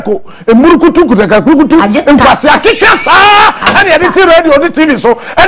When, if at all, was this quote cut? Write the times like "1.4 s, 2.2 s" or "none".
none